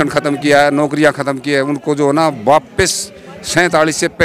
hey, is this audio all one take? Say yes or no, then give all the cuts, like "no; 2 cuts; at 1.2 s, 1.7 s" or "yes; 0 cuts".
yes; 0 cuts